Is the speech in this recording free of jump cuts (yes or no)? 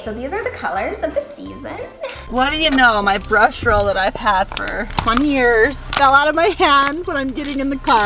no